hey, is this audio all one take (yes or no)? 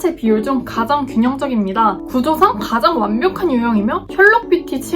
no